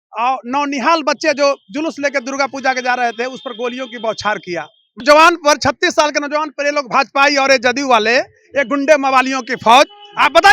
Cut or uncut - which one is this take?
cut